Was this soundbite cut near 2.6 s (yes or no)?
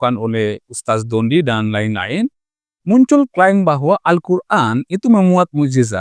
no